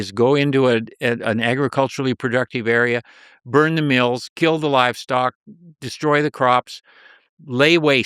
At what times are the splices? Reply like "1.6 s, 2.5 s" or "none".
none